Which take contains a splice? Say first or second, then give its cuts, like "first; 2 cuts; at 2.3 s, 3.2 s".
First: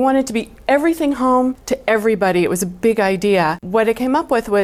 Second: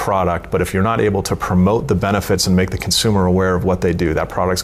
first; 2 cuts; at 1.7 s, 3.6 s